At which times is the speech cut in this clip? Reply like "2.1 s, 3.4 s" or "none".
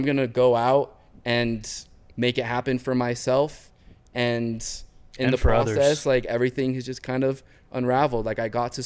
none